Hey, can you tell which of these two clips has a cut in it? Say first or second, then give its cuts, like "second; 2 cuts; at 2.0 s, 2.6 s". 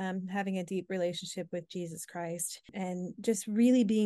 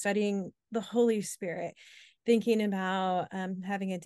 first; 1 cut; at 2.7 s